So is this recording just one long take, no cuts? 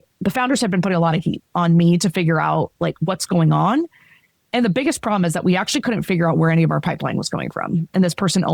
no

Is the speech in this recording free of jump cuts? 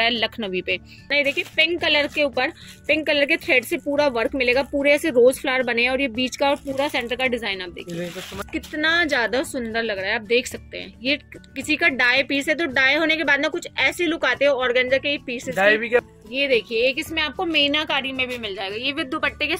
no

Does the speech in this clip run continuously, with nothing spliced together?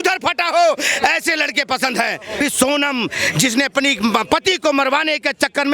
no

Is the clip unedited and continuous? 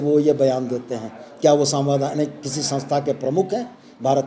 yes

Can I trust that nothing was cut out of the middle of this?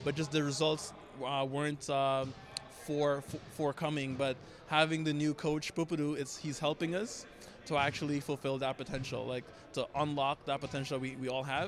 yes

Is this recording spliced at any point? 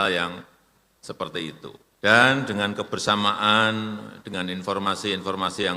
yes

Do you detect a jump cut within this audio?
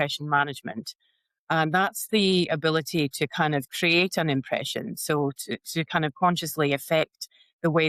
no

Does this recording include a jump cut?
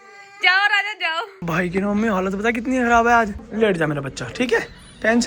yes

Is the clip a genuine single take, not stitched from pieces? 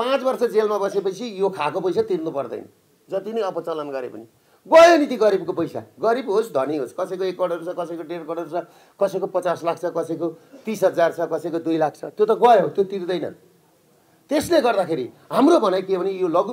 yes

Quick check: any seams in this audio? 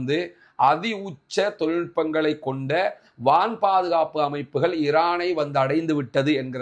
no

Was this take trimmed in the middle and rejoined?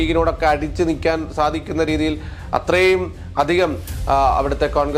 no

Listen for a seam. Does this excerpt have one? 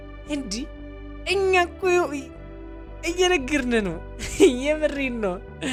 no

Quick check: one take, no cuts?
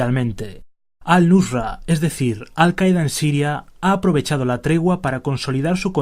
no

